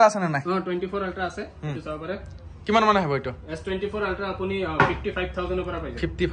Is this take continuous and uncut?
yes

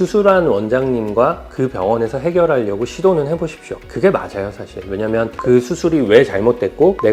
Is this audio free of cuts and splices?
yes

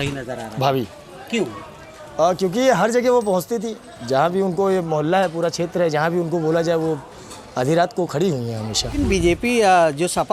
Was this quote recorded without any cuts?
no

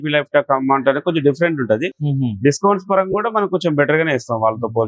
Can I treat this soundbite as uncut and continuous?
yes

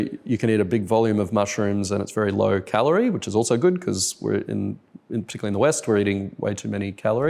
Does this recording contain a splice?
no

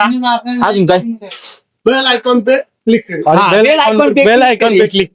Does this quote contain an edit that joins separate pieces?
no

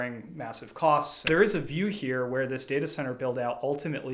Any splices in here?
yes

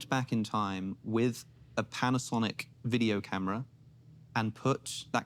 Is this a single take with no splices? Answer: yes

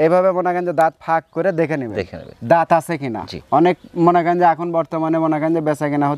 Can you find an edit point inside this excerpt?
no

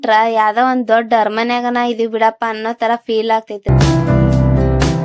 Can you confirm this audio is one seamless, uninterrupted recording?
no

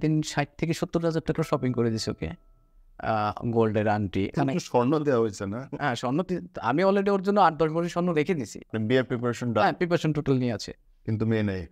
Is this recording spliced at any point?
yes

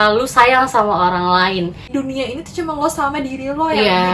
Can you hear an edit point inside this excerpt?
yes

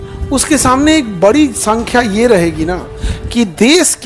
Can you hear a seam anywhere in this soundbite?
no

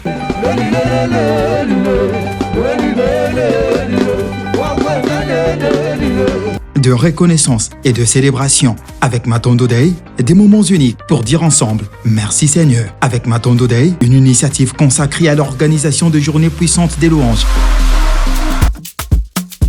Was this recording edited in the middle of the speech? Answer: yes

